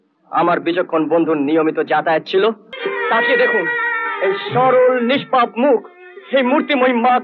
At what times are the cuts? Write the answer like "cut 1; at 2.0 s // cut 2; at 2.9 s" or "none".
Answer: cut 1; at 2.7 s